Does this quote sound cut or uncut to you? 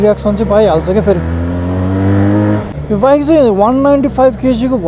cut